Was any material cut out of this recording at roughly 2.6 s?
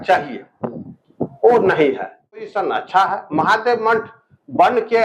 yes; 1 cut; at 2.6 s

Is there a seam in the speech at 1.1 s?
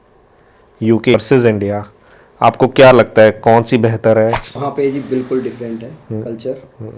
yes; 2 cuts; at 1.1 s, 4.5 s

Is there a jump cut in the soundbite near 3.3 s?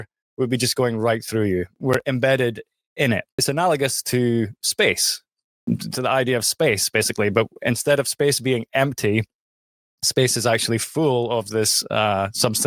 yes; 2 cuts; at 1.8 s, 3.3 s

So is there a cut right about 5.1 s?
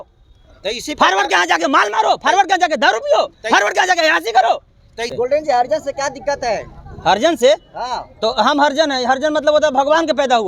yes; 1 cut; at 5.1 s

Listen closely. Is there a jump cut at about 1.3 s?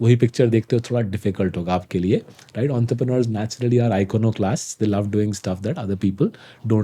no; 0 cuts

